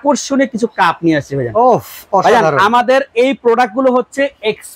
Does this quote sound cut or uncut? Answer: uncut